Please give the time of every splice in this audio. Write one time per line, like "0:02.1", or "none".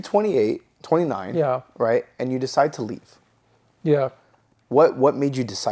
none